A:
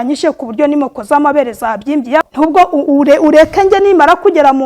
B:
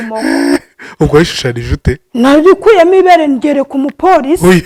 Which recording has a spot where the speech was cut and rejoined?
A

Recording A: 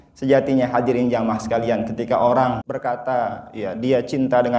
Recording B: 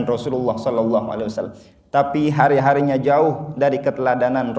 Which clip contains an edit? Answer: A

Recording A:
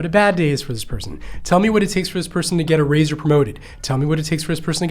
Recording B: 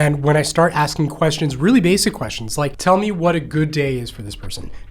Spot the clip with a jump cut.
B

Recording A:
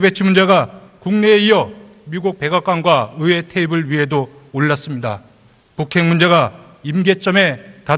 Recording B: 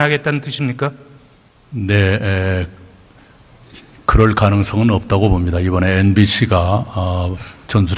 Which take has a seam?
A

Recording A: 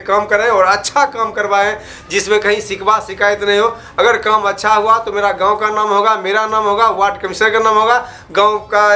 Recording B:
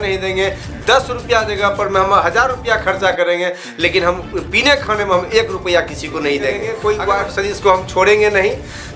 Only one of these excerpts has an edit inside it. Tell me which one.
B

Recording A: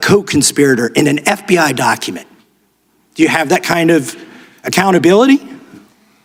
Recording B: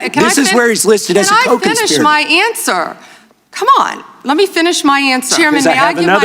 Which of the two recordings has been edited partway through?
B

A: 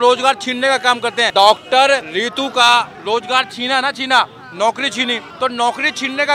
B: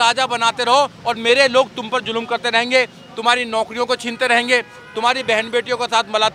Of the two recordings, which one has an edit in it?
A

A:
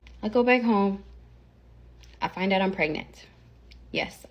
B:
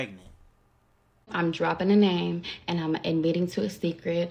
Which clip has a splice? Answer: B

